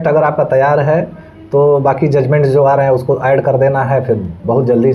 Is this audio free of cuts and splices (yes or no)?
yes